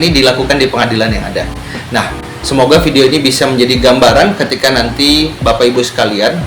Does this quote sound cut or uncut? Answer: uncut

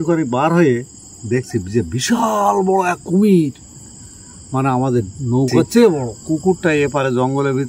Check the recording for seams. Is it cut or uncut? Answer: cut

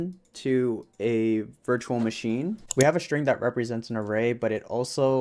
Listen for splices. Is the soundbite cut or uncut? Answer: cut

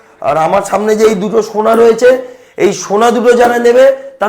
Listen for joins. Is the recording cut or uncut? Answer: uncut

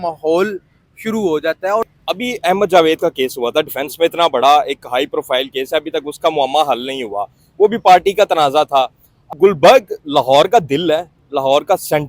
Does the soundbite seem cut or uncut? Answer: cut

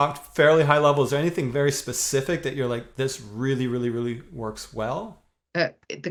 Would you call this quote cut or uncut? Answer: uncut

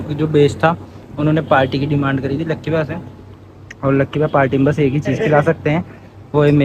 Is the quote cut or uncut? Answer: uncut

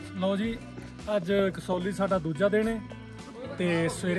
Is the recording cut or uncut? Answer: uncut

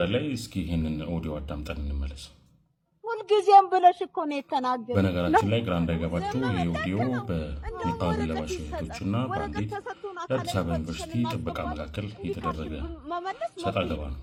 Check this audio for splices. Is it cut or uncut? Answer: uncut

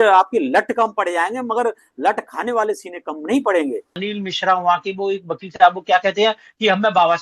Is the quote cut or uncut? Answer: cut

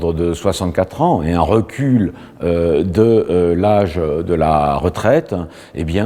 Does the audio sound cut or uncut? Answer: uncut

